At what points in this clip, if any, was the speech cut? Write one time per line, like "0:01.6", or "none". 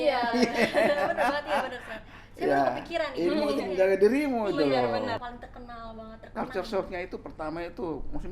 0:05.2

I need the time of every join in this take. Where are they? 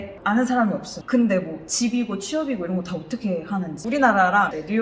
0:00.9
0:03.8

